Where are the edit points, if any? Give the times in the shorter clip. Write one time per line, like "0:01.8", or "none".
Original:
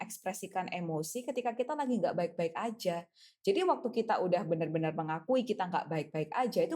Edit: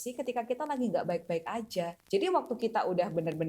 0:02.0